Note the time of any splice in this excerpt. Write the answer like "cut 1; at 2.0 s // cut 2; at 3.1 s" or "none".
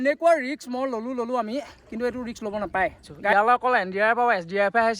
cut 1; at 3.3 s